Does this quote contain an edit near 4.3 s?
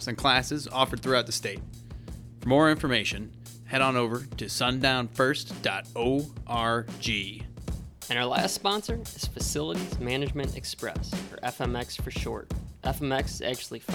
no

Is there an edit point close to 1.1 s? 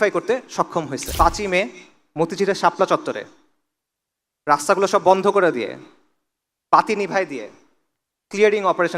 yes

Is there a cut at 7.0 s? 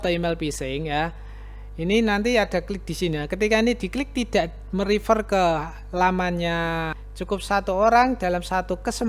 yes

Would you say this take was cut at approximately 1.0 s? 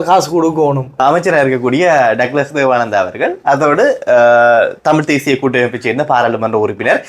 yes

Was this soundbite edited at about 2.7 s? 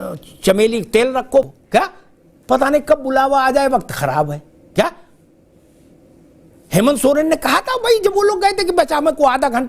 no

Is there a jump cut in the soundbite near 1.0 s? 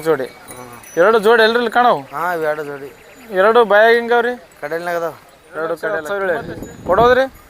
no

